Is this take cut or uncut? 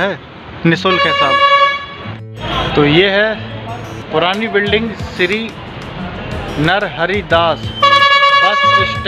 cut